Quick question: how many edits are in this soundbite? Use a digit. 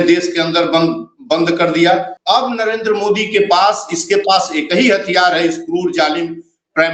1